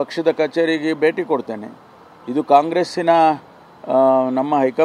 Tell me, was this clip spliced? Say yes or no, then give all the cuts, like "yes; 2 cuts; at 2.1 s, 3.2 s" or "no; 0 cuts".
no; 0 cuts